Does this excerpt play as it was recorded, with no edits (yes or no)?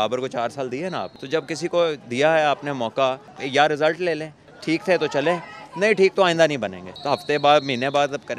no